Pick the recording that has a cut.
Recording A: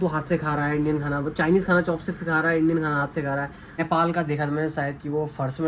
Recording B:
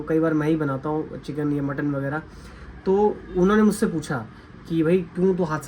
A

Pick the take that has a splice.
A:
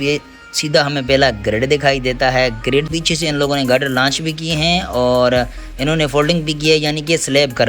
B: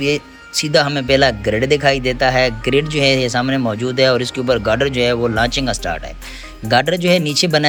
A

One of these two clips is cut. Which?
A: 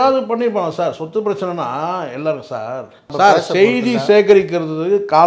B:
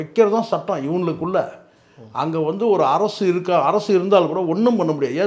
A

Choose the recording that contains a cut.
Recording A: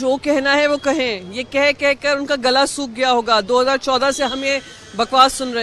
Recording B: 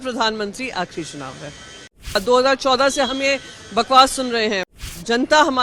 B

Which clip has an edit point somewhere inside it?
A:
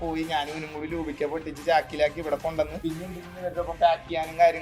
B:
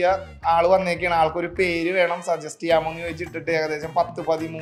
A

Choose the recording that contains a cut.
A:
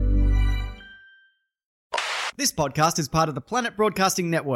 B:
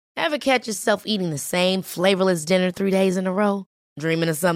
A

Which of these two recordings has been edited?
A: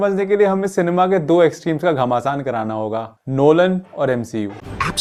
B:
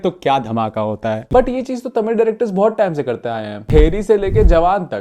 B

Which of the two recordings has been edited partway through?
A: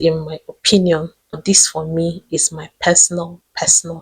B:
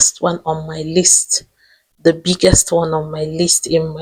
A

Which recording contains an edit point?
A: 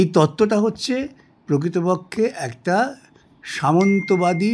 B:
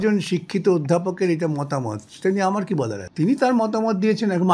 B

